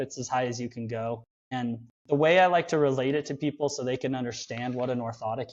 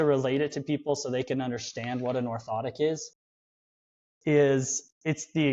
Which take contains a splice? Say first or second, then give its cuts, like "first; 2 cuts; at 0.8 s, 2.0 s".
first; 1 cut; at 1.7 s